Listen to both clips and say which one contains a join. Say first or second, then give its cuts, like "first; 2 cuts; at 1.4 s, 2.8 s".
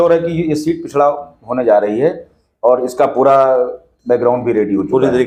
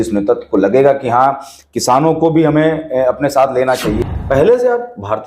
second; 1 cut; at 4.0 s